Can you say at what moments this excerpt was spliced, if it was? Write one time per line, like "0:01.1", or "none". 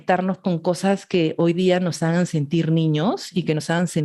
none